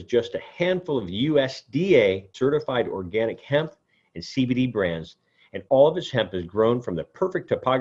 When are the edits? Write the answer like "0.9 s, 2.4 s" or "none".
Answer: 2.3 s